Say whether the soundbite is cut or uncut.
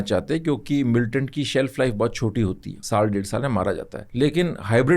cut